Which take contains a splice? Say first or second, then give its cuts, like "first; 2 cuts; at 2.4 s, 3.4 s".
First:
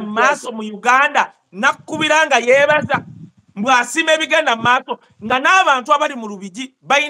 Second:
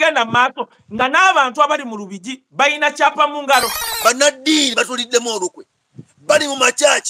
second; 1 cut; at 3.8 s